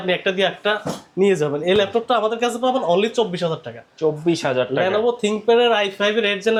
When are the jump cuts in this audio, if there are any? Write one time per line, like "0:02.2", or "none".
none